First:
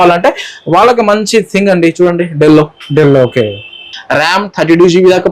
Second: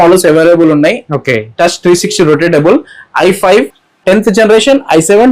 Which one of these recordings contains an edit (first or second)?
first